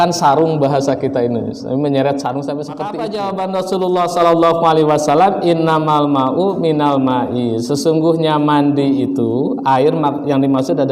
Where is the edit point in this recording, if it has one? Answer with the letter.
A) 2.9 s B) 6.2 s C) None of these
A